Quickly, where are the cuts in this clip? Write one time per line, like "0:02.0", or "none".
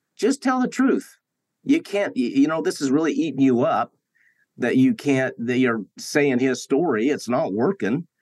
0:06.0